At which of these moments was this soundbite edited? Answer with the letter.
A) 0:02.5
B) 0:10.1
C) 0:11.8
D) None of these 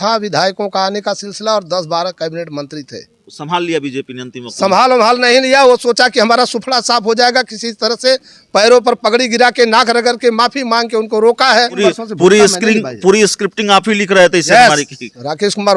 C